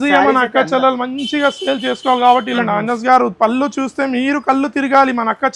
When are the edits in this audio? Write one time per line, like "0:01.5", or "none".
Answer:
0:02.5